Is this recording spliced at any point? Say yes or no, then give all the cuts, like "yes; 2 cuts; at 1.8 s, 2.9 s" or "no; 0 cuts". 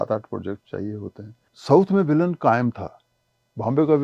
yes; 1 cut; at 1.5 s